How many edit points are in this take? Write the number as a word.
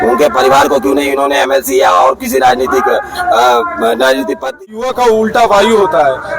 one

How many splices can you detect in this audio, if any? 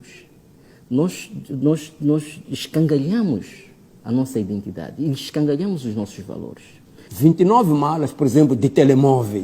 one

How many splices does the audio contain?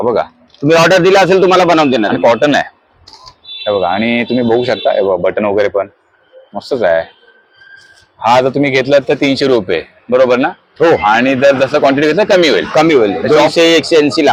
zero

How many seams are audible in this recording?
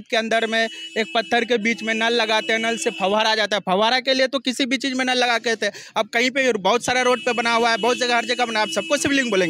zero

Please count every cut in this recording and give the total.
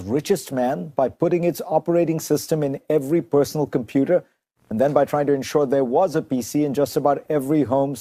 zero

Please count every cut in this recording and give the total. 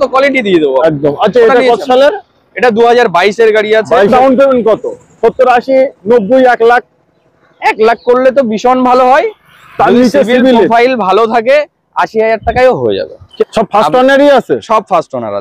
two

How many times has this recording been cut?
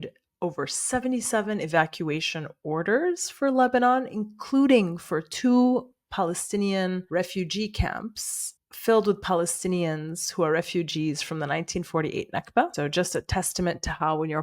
one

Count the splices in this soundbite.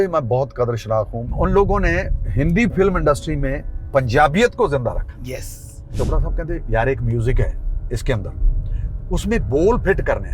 three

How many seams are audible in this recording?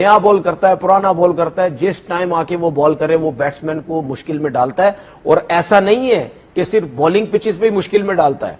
zero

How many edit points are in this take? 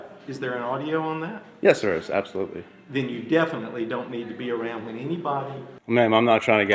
one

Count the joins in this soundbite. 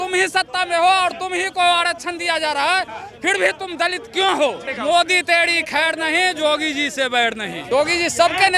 two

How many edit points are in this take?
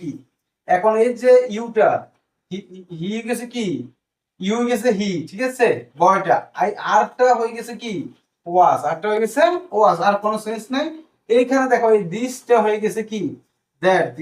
zero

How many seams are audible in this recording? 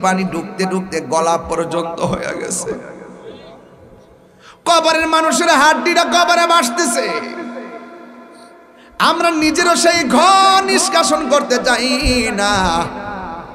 zero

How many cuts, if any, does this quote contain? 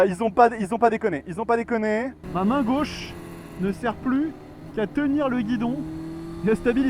one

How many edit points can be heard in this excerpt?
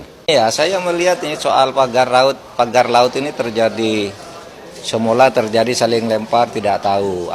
zero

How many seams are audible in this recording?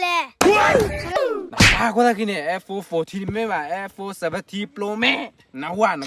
one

